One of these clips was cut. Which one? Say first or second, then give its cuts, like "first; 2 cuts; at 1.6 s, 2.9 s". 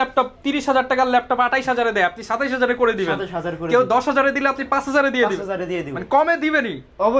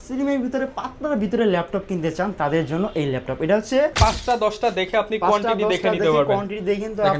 second; 1 cut; at 3.9 s